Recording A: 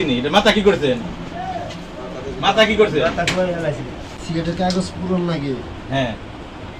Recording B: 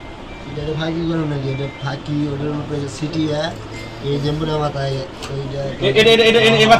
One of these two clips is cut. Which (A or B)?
A